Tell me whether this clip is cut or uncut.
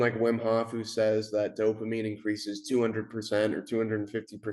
uncut